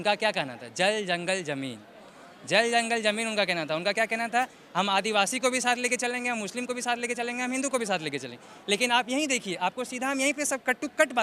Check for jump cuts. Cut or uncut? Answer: uncut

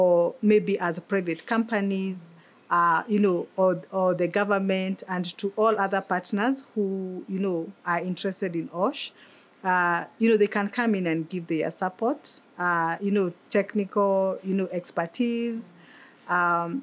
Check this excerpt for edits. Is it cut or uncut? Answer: uncut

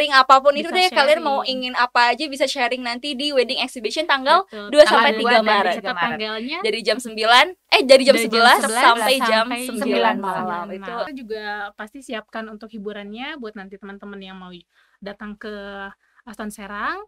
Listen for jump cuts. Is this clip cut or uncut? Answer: cut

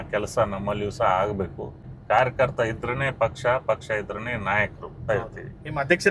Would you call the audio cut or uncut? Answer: cut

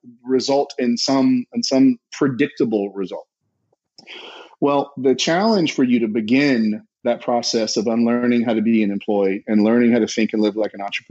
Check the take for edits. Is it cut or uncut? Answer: uncut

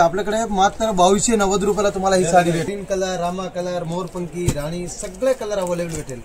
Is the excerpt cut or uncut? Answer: cut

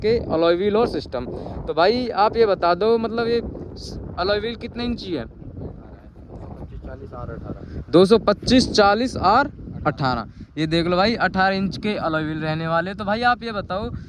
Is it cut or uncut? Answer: uncut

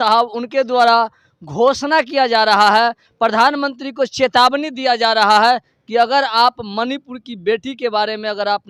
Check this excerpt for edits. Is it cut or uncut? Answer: uncut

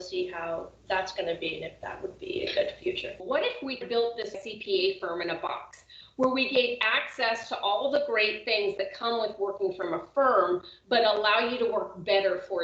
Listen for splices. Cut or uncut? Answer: cut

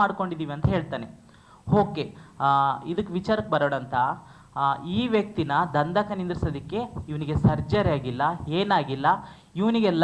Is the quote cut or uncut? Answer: uncut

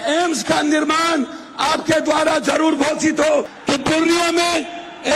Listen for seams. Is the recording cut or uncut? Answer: cut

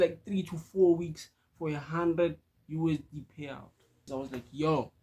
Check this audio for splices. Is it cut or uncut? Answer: cut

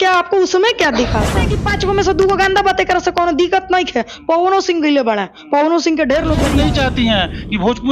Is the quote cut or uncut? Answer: cut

